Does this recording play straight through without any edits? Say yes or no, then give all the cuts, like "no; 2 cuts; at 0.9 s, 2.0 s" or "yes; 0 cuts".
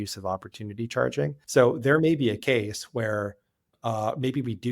no; 2 cuts; at 1.4 s, 3.8 s